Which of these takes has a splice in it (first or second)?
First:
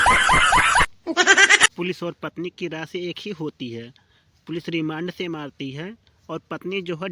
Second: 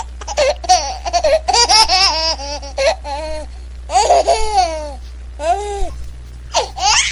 first